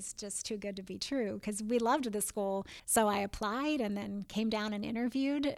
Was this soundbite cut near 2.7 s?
yes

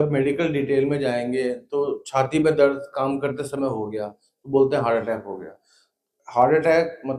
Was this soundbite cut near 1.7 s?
no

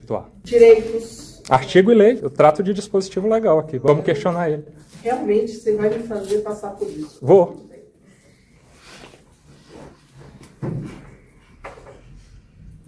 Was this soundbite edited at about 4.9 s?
no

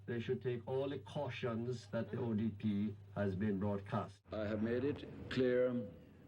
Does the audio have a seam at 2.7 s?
no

